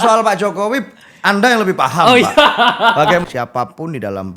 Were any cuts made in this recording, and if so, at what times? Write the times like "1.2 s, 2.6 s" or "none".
3.2 s